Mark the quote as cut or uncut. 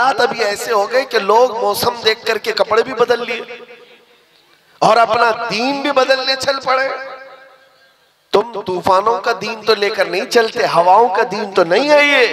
uncut